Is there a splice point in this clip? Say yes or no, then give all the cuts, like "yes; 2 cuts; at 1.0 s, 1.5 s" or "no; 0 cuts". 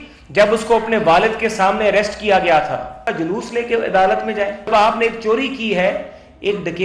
yes; 2 cuts; at 3.1 s, 4.7 s